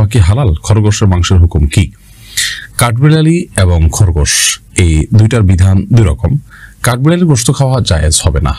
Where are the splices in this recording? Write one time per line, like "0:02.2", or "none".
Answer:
none